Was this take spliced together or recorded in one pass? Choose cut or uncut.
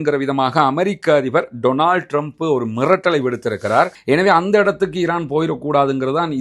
cut